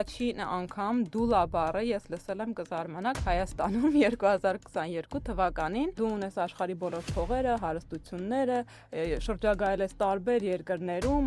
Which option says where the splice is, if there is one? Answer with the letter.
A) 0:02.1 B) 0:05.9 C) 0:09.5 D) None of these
B